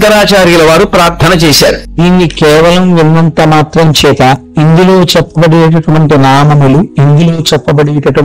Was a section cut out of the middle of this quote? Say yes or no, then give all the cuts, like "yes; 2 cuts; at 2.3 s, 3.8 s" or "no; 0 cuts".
yes; 3 cuts; at 1.9 s, 4.5 s, 6.9 s